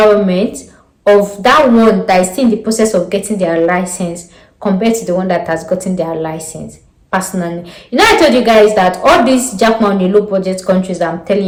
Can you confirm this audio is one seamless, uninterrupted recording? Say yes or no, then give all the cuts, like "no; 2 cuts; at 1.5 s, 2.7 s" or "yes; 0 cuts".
yes; 0 cuts